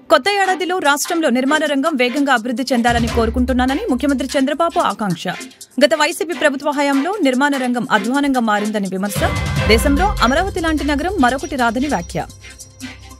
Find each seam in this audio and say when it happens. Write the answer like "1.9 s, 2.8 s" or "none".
none